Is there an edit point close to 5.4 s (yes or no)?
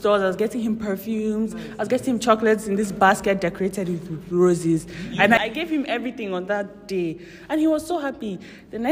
yes